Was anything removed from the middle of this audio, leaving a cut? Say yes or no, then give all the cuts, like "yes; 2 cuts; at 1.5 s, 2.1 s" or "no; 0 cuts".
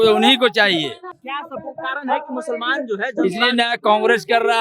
yes; 1 cut; at 1.2 s